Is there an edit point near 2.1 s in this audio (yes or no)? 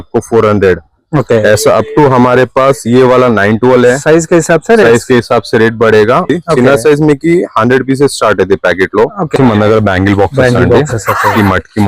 no